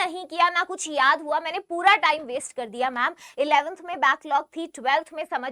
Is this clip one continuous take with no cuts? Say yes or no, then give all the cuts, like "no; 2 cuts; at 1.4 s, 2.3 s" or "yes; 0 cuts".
yes; 0 cuts